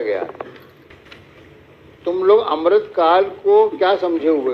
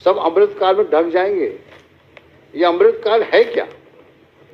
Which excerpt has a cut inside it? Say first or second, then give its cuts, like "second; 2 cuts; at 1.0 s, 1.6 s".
first; 1 cut; at 0.9 s